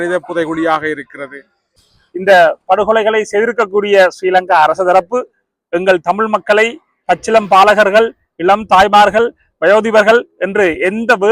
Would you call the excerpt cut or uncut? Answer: cut